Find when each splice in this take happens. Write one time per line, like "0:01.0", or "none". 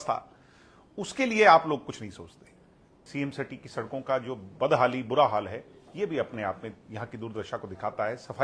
0:03.1